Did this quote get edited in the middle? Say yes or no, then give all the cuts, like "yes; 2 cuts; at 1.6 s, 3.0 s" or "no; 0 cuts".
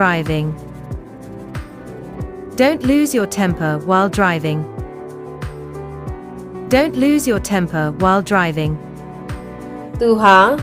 yes; 5 cuts; at 1.0 s, 2.5 s, 4.6 s, 6.0 s, 9.4 s